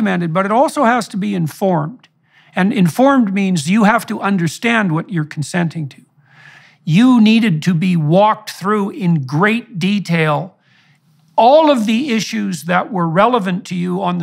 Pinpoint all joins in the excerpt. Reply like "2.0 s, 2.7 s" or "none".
6.5 s